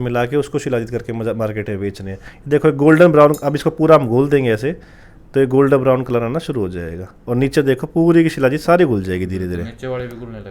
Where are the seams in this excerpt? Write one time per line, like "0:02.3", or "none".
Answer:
none